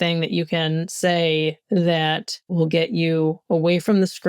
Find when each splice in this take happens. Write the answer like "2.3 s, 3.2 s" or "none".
2.5 s